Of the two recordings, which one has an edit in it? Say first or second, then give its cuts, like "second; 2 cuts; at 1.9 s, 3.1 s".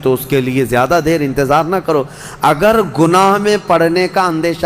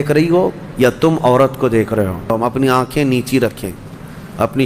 second; 1 cut; at 2.3 s